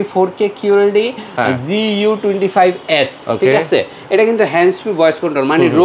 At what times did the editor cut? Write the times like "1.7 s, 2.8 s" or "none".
none